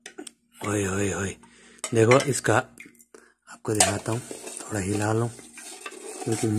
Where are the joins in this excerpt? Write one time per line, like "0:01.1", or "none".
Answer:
none